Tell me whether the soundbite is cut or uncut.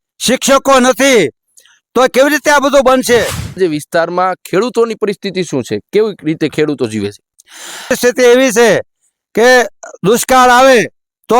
cut